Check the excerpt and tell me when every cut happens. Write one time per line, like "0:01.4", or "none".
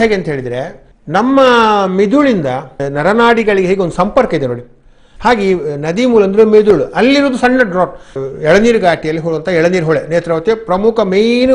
0:02.8
0:08.1